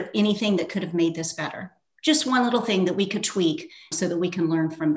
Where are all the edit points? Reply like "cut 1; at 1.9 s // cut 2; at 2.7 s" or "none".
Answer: cut 1; at 3.9 s